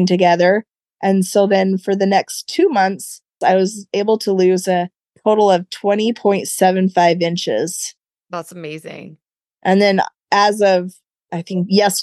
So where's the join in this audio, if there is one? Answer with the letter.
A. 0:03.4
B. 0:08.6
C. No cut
A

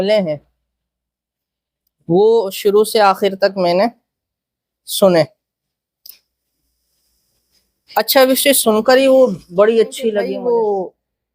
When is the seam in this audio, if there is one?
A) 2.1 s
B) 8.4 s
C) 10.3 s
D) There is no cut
C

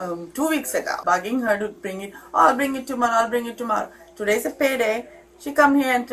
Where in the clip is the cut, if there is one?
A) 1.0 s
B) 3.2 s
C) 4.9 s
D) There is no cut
A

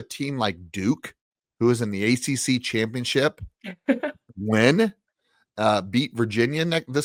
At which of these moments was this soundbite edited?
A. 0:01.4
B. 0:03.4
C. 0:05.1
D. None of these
D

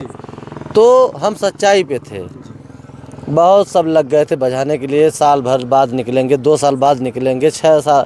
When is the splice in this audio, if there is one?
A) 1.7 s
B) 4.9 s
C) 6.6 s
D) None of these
D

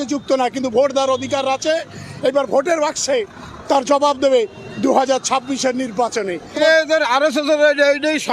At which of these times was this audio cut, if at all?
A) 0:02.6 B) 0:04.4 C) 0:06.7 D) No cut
C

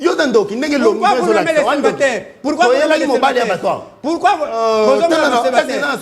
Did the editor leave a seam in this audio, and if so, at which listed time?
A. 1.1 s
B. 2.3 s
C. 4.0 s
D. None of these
D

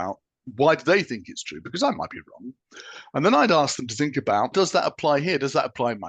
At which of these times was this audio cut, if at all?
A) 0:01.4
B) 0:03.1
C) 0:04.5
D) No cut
C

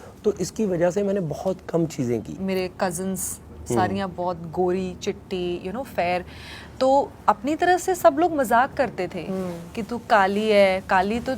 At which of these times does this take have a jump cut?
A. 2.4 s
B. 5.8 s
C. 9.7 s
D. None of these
A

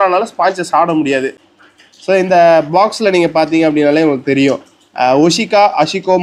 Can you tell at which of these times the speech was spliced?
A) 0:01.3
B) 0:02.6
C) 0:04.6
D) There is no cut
A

